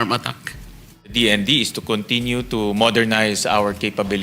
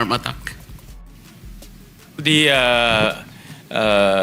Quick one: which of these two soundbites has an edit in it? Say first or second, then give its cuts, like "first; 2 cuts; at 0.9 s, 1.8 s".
first; 1 cut; at 1.1 s